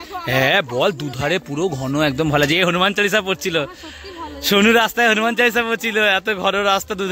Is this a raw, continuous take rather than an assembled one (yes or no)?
yes